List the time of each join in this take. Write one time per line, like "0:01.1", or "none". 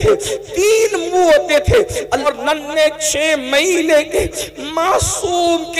0:02.3

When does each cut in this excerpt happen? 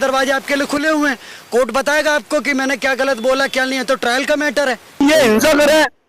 0:05.0

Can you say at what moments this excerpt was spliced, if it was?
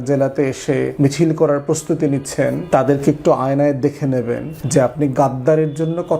0:00.9
0:02.6
0:04.5

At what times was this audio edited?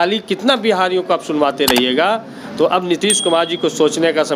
none

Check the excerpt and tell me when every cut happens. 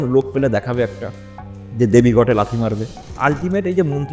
0:03.0

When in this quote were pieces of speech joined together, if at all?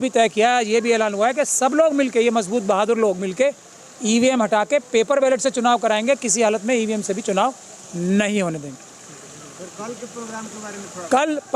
none

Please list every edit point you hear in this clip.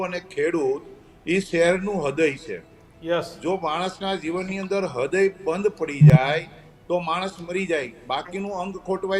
none

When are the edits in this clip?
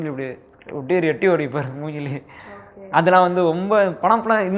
none

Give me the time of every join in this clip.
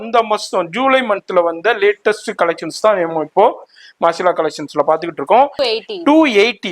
0:05.5

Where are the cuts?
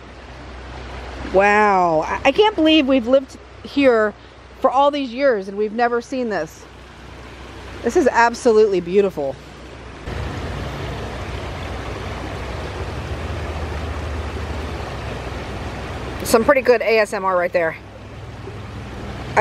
0:10.1

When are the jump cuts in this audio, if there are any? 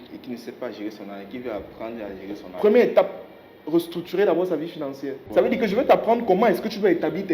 0:05.2

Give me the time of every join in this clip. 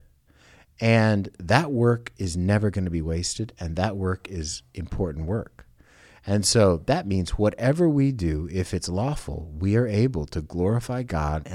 none

